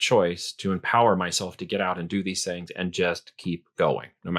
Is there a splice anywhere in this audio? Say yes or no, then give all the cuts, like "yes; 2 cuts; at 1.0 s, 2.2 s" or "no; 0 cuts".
no; 0 cuts